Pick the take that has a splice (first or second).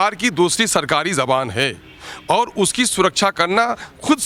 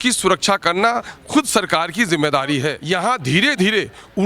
second